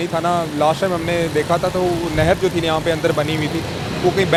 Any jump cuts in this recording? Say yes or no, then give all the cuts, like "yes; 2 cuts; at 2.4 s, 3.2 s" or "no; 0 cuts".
no; 0 cuts